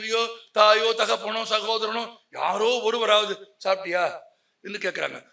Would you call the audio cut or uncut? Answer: uncut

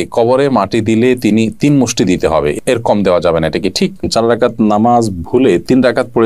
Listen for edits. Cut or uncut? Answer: cut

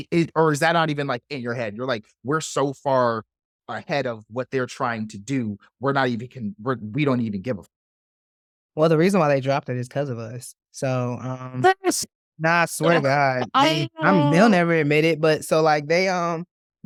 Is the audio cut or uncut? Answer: uncut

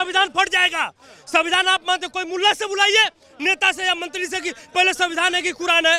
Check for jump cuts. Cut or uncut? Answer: uncut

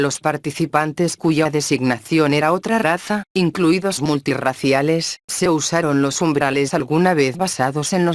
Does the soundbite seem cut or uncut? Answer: cut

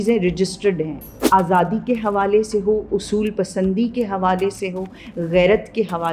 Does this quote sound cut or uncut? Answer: cut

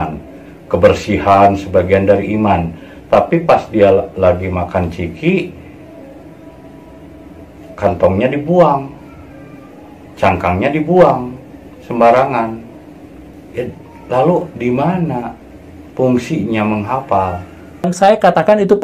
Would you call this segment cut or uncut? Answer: cut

